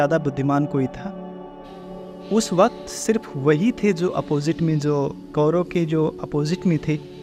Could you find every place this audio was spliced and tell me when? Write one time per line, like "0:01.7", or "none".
none